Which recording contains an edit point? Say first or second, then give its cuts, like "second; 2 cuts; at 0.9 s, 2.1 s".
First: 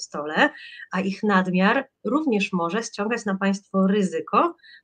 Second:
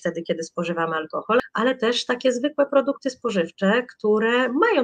second; 1 cut; at 1.4 s